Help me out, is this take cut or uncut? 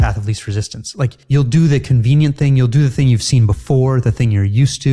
cut